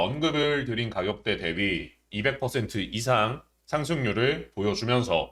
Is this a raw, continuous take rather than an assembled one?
yes; 0 cuts

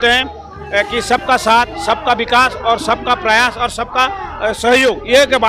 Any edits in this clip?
no; 0 cuts

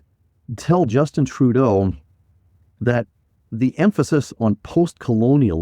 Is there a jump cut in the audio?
yes; 1 cut; at 4.4 s

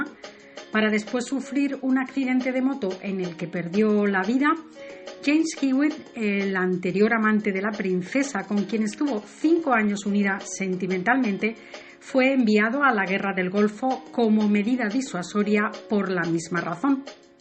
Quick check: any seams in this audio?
no; 0 cuts

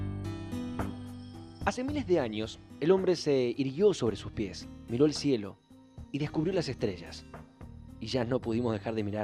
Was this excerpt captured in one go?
no; 1 cut; at 4.1 s

